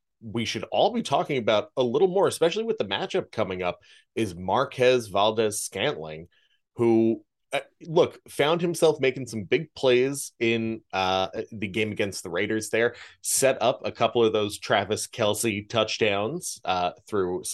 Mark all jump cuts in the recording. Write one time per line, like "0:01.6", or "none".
none

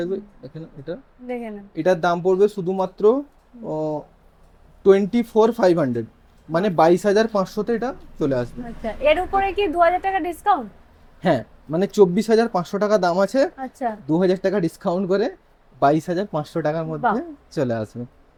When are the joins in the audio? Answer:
none

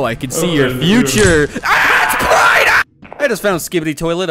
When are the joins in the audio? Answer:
0:02.8

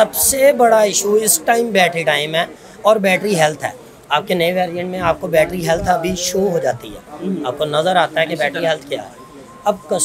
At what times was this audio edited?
none

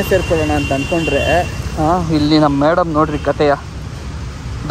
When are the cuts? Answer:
none

